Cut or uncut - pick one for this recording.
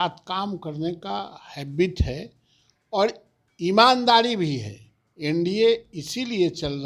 uncut